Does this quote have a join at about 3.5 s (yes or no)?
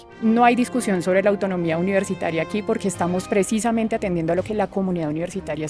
no